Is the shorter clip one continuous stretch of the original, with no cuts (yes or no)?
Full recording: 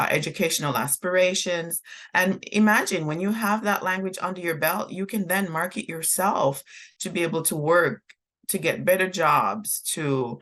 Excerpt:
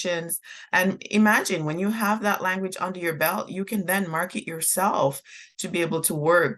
yes